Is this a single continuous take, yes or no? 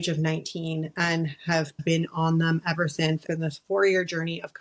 no